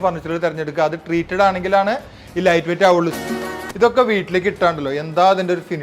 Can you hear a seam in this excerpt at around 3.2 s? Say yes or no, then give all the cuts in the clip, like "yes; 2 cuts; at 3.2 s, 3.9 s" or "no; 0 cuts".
yes; 1 cut; at 3.2 s